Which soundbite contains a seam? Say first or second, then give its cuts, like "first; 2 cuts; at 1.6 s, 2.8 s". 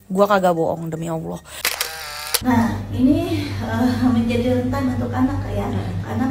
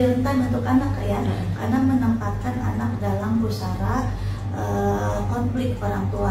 first; 1 cut; at 1.7 s